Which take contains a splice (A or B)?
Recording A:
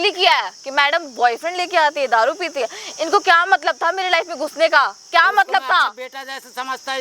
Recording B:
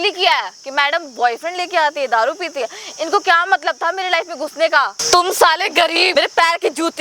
B